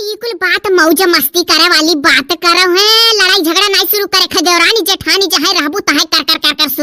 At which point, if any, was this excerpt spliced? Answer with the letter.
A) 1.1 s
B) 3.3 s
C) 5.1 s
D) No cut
D